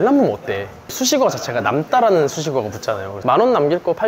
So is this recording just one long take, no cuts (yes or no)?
no